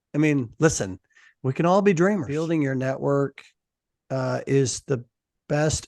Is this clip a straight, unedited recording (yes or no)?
no